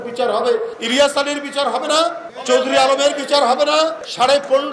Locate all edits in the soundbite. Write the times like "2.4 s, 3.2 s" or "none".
none